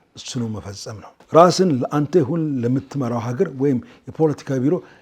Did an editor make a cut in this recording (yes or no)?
yes